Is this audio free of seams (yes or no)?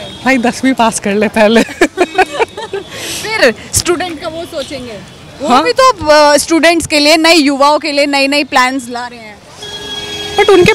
yes